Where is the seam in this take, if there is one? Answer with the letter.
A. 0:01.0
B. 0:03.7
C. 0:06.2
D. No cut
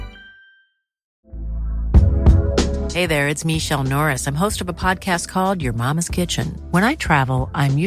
A